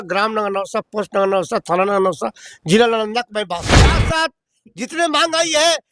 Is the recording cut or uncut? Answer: cut